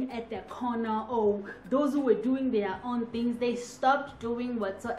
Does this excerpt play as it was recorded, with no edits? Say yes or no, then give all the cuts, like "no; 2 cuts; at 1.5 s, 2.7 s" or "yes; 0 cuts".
yes; 0 cuts